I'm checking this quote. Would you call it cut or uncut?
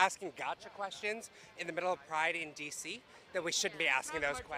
uncut